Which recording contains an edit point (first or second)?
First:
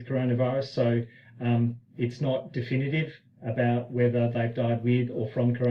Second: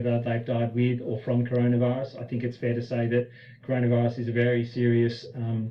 second